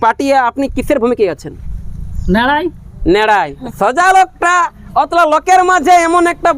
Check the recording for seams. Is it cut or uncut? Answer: cut